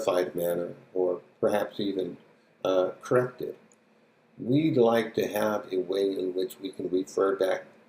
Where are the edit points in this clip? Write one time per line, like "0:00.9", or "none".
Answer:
none